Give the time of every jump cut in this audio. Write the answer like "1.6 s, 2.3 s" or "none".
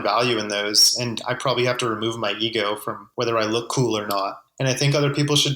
3.0 s, 4.4 s